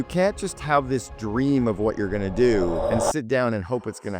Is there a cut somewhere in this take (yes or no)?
yes